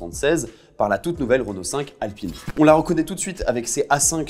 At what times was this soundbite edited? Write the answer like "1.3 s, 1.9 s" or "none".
2.4 s